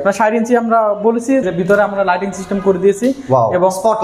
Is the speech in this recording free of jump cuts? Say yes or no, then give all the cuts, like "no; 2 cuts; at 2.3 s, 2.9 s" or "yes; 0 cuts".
no; 1 cut; at 1.5 s